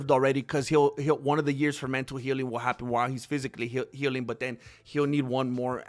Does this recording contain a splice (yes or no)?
no